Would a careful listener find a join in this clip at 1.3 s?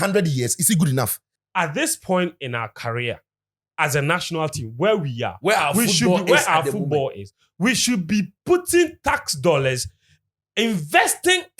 yes; 1 cut; at 1.3 s

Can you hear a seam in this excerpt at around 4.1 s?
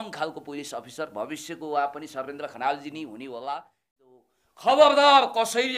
yes; 1 cut; at 4.1 s

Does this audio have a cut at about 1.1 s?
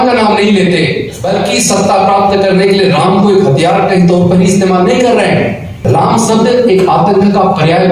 yes; 2 cuts; at 1.1 s, 5.7 s

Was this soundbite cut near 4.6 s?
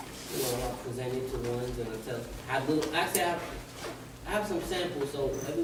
no; 0 cuts

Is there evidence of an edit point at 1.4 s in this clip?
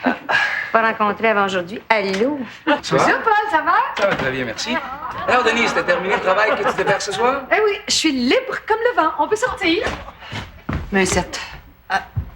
no; 2 cuts; at 2.8 s, 9.8 s

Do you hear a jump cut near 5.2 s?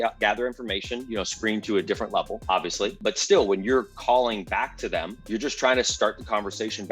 yes; 2 cuts; at 2.9 s, 5.2 s

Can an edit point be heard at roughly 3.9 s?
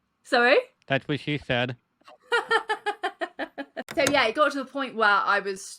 yes; 1 cut; at 3.9 s

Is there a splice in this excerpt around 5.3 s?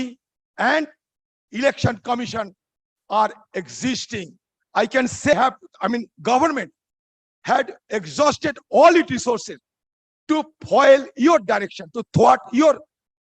yes; 1 cut; at 5.3 s

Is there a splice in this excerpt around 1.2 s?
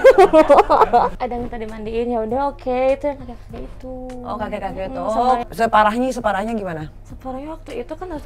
yes; 2 cuts; at 1.2 s, 5.4 s

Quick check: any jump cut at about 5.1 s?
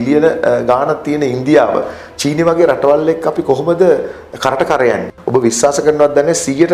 yes; 1 cut; at 5.1 s

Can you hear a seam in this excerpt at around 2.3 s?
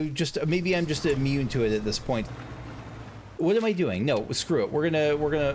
yes; 1 cut; at 2.3 s

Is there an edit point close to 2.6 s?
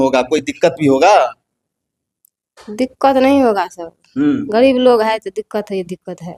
no; 0 cuts

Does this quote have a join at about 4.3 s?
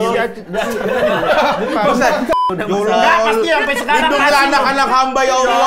no; 1 cut; at 2.4 s

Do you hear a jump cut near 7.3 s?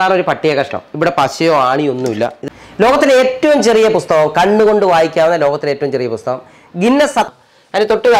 yes; 2 cuts; at 2.4 s, 7.3 s

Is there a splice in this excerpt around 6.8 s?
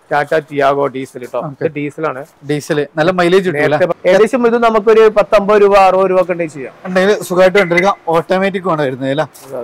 no; 1 cut; at 3.9 s

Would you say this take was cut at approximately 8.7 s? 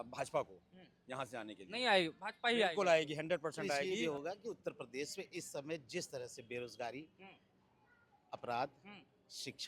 no; 1 cut; at 3.8 s

